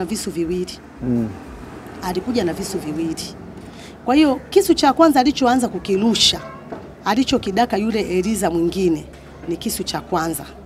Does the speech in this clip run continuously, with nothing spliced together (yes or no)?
yes